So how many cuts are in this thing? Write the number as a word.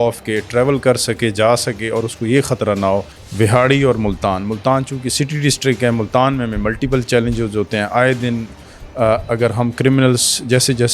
one